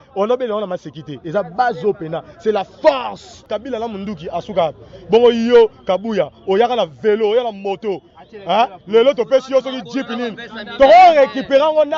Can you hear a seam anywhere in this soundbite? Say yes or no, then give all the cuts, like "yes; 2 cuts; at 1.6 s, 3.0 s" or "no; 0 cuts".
yes; 1 cut; at 3.4 s